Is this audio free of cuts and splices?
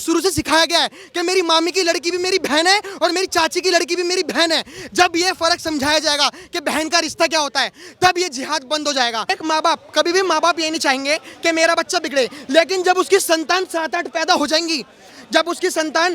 no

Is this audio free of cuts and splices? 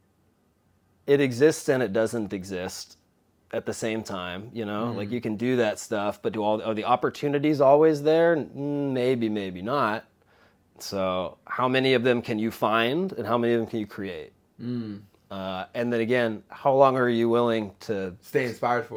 yes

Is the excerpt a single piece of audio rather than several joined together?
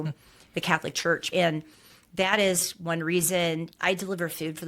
no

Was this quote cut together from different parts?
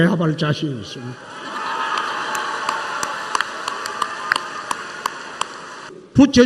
yes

